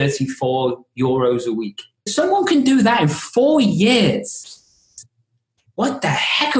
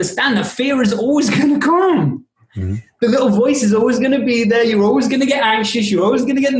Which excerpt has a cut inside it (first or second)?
first